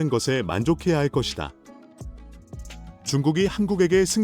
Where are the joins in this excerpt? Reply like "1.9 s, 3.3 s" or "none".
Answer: 1.6 s, 3.0 s